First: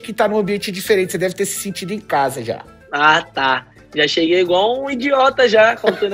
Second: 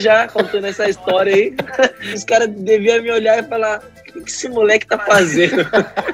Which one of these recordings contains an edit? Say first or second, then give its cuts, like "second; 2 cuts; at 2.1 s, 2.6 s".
second; 1 cut; at 2.2 s